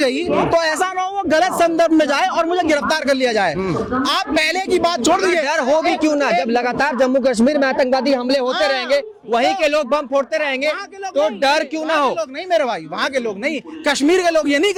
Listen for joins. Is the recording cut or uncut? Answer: uncut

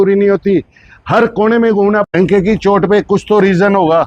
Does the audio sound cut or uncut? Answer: cut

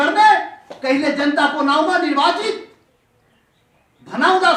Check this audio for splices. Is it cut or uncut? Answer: uncut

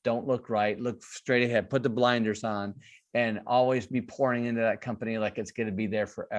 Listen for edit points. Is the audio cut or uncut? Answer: uncut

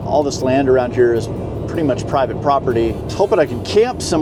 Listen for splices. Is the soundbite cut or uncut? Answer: uncut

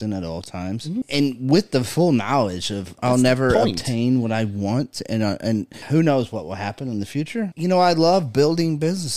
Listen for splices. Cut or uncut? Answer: cut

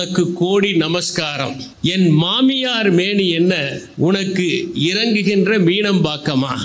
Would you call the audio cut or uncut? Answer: cut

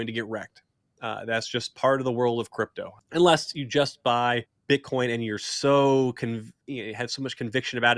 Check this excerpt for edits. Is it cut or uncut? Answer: cut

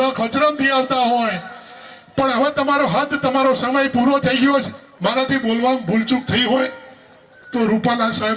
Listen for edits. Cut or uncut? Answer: cut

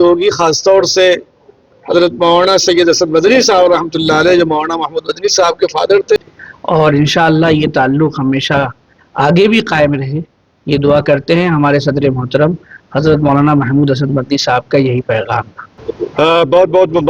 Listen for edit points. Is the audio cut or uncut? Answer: cut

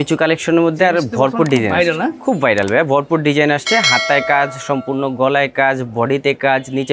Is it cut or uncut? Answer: uncut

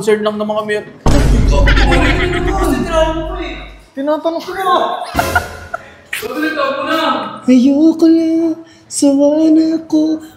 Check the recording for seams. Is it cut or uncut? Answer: uncut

